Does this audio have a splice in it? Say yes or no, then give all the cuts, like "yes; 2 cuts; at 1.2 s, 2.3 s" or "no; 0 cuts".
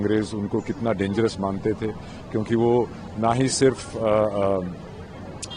no; 0 cuts